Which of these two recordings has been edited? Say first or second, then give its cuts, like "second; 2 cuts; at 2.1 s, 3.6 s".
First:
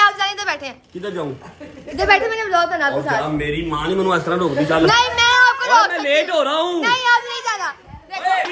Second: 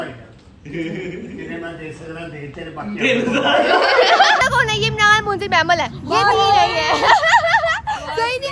second; 1 cut; at 4.4 s